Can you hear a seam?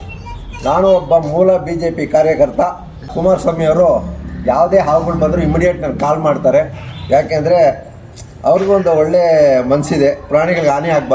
yes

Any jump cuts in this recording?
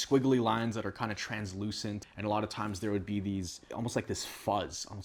no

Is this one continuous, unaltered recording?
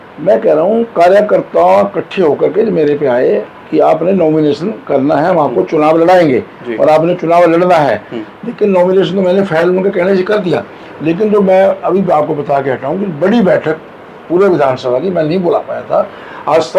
yes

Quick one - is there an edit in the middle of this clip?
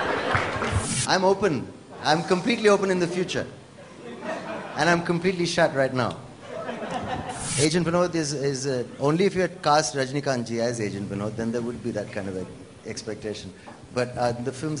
yes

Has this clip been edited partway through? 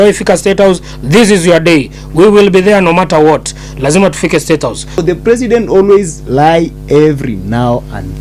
yes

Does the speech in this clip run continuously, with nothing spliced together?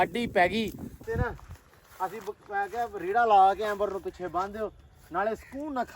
no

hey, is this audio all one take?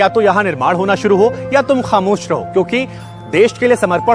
yes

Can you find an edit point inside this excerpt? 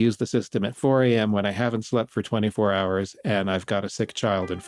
no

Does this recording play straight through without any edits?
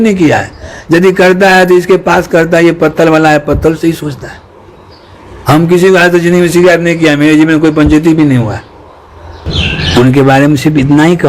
no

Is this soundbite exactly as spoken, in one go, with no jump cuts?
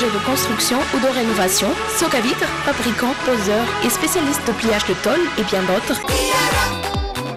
no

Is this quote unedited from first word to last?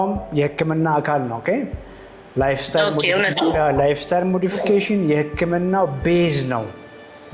yes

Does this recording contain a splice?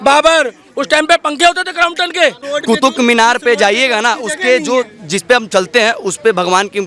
yes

